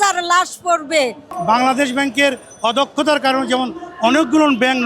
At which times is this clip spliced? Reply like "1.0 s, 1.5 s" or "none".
1.3 s